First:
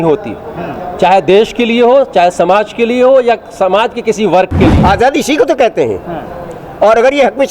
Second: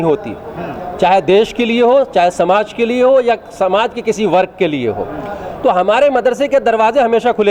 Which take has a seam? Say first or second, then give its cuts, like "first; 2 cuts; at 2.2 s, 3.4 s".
first; 1 cut; at 4.8 s